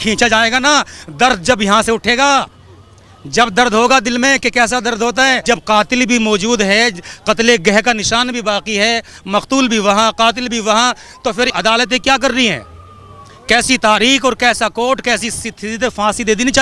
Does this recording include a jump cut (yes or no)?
yes